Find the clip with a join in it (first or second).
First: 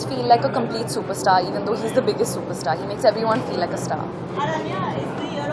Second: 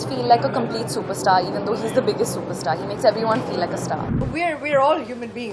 second